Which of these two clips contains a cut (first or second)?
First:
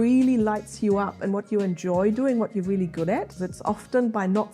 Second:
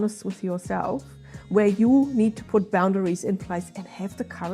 first